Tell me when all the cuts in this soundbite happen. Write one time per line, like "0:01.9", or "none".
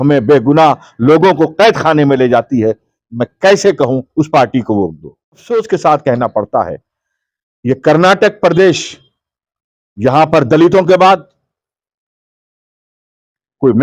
0:05.4